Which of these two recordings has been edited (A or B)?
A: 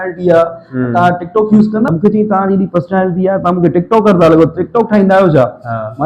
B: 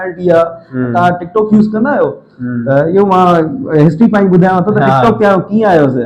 A